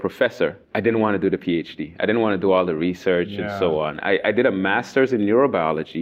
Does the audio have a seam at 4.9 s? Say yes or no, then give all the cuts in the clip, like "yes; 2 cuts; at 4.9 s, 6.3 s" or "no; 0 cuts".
no; 0 cuts